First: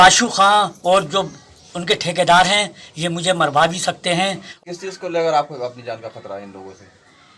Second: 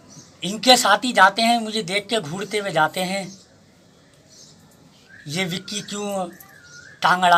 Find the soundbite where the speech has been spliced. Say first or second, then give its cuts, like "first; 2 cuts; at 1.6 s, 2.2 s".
first; 1 cut; at 4.5 s